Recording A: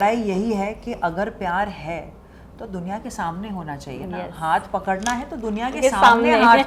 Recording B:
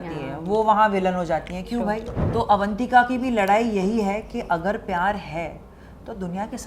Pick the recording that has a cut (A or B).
B